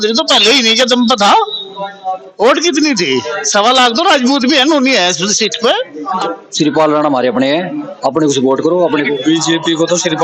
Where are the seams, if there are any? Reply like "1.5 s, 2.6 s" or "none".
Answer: 6.2 s, 9.1 s